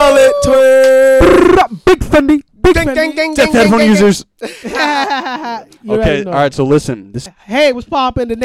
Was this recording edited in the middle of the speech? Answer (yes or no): yes